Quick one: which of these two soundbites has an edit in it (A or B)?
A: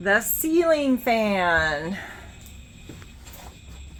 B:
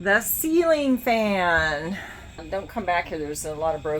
B